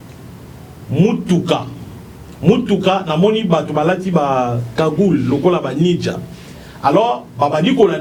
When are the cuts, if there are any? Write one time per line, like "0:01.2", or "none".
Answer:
none